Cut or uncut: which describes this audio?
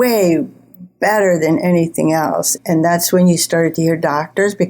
cut